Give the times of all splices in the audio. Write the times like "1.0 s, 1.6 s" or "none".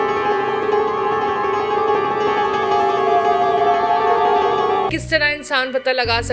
5.0 s